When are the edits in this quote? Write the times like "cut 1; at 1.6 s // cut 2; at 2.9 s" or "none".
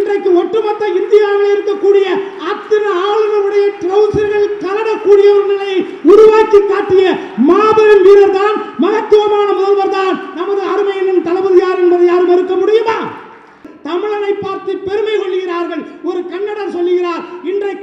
cut 1; at 13.7 s